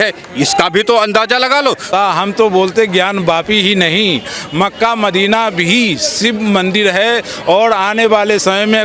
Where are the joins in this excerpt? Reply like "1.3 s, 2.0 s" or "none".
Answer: 1.9 s